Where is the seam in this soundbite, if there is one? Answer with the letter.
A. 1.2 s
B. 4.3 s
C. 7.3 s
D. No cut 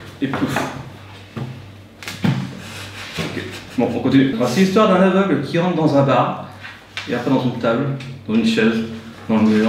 B